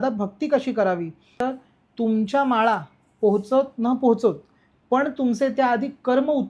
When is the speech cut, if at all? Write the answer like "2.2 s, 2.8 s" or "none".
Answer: 1.3 s